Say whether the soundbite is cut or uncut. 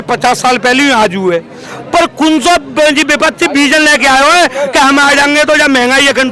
uncut